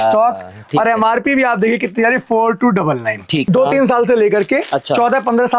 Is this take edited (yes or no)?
yes